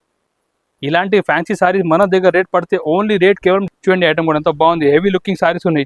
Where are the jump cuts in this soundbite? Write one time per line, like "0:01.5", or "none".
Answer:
0:03.7